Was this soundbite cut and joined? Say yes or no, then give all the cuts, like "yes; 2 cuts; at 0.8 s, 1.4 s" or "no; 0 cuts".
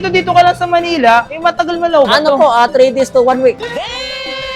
no; 0 cuts